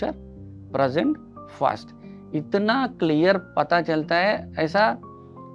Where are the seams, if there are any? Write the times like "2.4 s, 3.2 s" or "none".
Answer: none